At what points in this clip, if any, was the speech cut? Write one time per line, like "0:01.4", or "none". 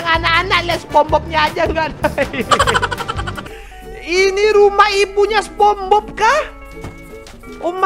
0:03.4